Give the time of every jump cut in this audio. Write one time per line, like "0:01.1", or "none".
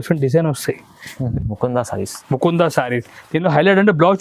0:01.3